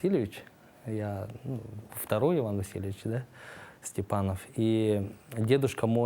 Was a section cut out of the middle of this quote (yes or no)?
no